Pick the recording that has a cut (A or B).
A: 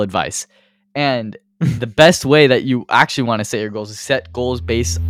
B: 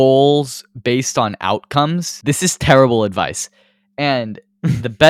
B